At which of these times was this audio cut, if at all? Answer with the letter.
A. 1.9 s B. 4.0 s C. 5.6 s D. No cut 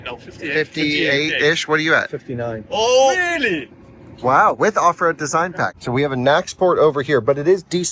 C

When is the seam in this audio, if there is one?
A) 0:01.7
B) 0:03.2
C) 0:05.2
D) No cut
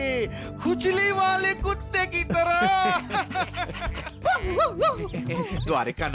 C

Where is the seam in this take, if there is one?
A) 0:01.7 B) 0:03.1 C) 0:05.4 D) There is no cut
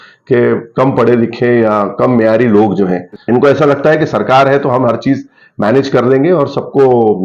B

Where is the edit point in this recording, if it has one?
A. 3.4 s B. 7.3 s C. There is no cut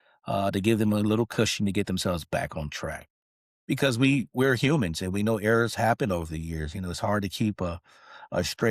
A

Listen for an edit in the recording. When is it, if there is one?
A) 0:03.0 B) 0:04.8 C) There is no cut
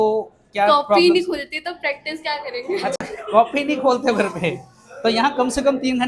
C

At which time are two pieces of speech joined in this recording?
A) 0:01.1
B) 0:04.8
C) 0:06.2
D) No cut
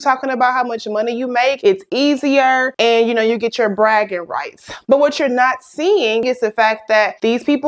C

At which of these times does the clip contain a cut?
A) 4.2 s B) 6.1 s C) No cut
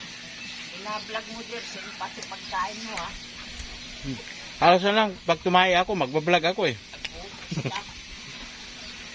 C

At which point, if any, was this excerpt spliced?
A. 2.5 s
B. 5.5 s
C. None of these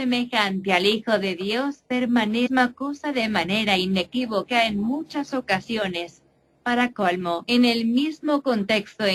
C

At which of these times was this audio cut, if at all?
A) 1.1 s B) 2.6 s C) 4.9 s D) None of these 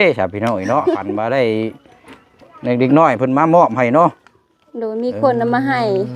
A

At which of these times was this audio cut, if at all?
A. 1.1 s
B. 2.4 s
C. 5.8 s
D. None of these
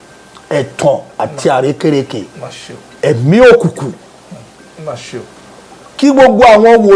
D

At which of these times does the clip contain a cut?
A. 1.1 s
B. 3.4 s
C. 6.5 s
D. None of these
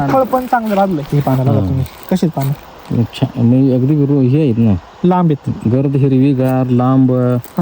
A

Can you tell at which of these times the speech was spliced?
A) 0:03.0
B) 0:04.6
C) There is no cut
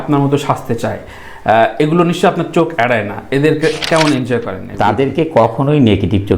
B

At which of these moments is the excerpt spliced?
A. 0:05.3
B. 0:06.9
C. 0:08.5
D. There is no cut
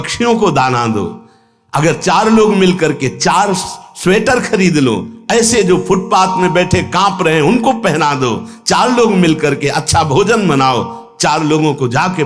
D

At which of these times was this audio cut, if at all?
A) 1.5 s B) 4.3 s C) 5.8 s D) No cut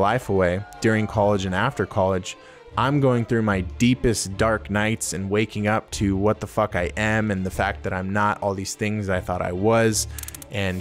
D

